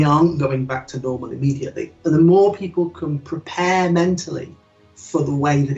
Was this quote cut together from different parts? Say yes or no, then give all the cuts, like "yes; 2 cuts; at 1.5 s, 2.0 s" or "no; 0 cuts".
no; 0 cuts